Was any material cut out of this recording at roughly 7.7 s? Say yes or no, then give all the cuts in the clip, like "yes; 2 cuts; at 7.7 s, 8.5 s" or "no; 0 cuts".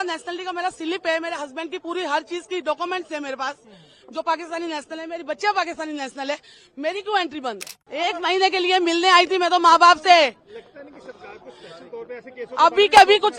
yes; 1 cut; at 7.7 s